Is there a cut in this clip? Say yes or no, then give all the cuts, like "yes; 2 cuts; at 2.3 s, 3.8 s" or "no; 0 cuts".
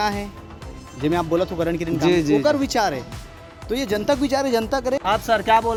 no; 0 cuts